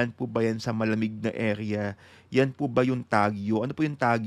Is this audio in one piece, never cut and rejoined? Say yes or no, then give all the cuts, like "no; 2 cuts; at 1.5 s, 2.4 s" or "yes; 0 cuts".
yes; 0 cuts